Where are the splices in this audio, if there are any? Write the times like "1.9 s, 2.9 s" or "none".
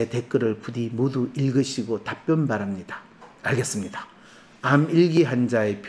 none